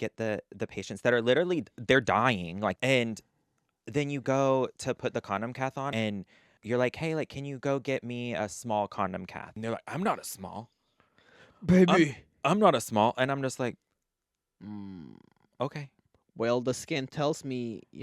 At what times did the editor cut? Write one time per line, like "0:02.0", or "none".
0:02.8
0:05.9
0:09.5